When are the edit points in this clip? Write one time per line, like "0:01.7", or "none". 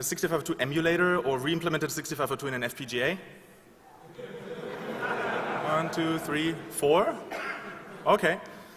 0:06.5